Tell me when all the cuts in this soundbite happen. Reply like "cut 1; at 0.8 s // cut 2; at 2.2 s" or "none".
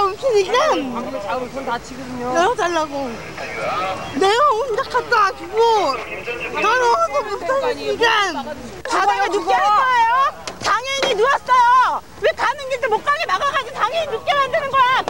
cut 1; at 8.8 s